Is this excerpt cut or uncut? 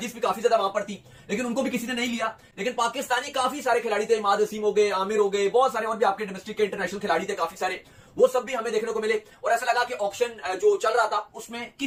uncut